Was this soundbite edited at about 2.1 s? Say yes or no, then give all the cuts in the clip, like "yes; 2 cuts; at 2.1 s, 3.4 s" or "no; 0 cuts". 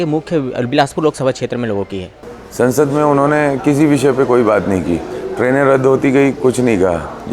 yes; 1 cut; at 2.1 s